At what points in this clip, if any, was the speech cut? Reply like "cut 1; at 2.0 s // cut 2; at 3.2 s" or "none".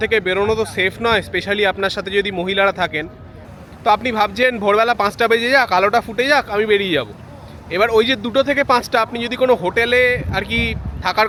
none